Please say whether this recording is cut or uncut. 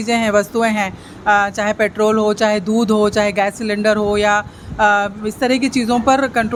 uncut